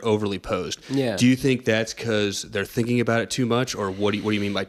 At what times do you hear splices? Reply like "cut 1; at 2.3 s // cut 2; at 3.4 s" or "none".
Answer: none